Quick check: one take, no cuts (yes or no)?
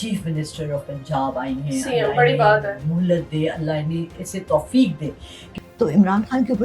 no